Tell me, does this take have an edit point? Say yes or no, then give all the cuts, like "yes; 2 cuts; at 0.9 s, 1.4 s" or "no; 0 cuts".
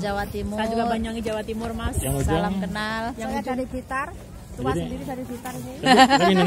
no; 0 cuts